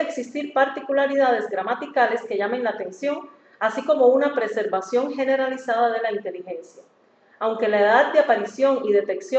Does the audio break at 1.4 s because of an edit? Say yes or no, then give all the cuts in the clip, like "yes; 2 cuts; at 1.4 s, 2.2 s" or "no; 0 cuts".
no; 0 cuts